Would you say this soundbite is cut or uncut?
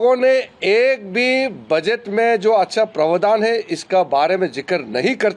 uncut